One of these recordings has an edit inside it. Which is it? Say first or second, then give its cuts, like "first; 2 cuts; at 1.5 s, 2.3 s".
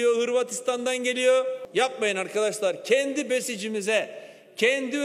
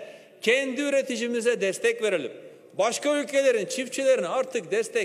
first; 1 cut; at 1.6 s